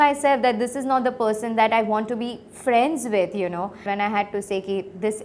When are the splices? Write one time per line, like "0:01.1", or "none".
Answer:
0:03.9